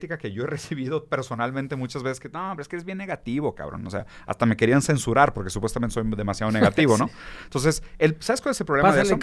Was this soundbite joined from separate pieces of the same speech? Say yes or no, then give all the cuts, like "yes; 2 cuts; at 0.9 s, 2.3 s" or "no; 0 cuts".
no; 0 cuts